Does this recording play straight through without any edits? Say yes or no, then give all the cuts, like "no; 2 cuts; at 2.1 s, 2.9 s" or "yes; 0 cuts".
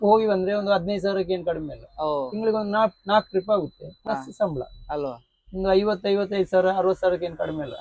yes; 0 cuts